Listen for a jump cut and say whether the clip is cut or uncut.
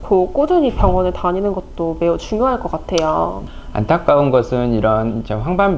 cut